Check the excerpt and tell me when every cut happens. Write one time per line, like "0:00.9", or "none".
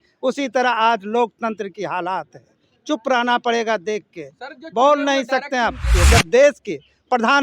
0:05.9